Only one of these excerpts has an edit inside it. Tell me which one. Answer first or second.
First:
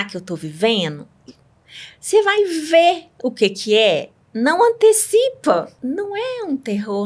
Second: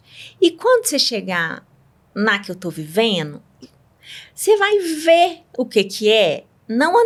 first